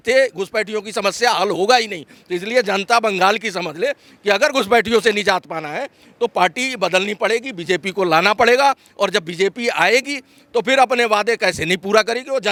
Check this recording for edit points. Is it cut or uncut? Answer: uncut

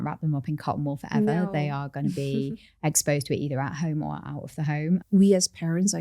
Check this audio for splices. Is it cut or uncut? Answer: cut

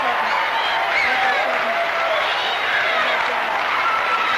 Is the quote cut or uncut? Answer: uncut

